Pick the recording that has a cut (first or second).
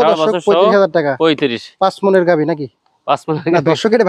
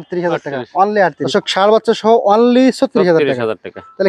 second